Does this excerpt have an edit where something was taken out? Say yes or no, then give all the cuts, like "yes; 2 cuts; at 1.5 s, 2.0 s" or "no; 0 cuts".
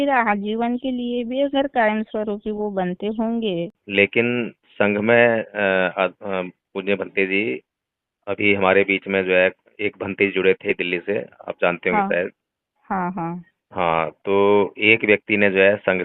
yes; 2 cuts; at 3.8 s, 10.7 s